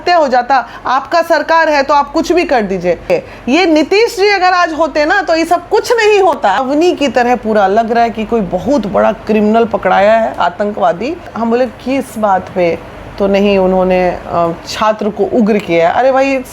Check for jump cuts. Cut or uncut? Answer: cut